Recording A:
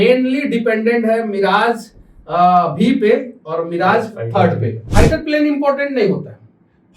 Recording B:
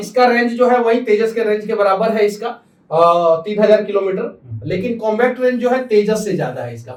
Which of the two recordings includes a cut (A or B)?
A